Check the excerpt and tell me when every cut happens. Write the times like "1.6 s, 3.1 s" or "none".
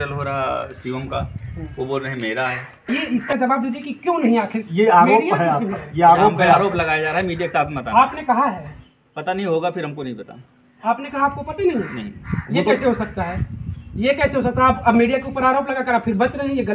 2.9 s